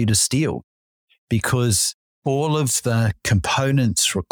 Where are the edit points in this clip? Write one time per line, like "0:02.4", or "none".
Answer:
none